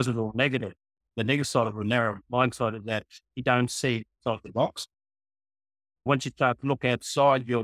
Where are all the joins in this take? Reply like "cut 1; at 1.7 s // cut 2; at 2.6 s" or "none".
cut 1; at 1.1 s // cut 2; at 4.1 s // cut 3; at 6.1 s